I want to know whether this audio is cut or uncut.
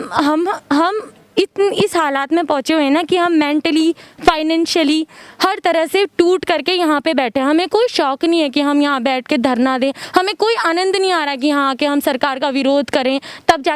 uncut